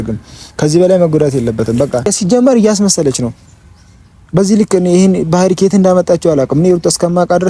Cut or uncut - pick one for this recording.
cut